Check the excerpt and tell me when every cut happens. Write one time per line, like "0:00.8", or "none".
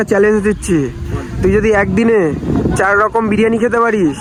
none

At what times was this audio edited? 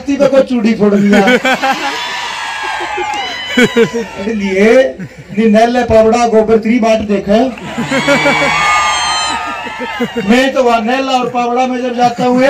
0:04.1

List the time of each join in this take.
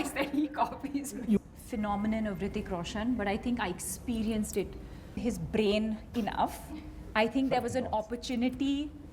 0:01.4
0:05.2

